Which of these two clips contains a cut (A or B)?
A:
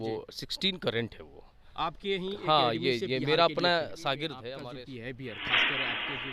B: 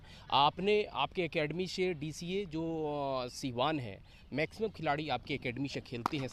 A